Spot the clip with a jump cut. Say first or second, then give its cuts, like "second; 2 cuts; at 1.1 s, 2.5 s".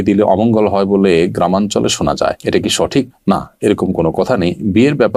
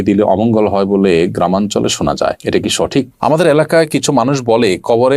second; 1 cut; at 3.3 s